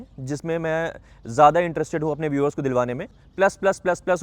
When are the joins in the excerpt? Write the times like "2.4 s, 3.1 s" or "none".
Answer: 3.2 s